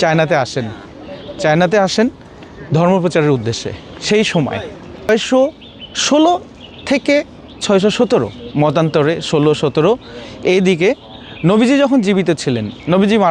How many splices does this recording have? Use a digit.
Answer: 1